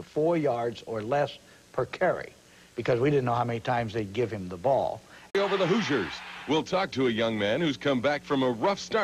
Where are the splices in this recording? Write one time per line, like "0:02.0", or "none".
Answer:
none